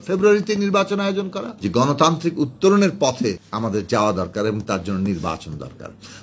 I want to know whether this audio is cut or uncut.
cut